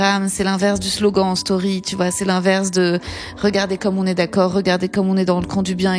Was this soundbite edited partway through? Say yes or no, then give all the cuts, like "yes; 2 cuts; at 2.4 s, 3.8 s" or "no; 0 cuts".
no; 0 cuts